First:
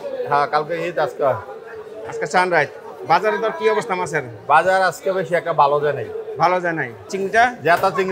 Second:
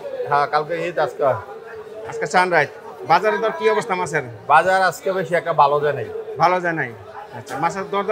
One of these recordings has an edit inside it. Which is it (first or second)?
first